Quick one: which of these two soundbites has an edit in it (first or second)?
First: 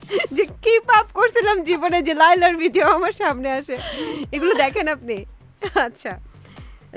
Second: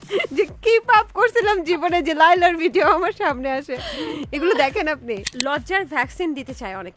second